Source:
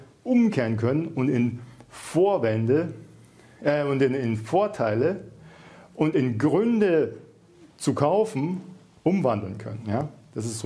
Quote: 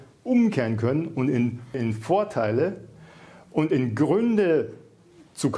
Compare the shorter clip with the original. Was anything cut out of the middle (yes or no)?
yes